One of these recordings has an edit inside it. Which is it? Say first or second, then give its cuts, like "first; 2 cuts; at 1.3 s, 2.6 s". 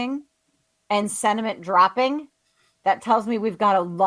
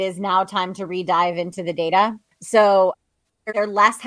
second; 1 cut; at 2.3 s